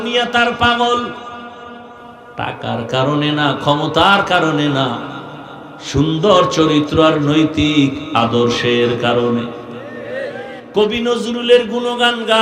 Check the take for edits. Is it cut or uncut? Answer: uncut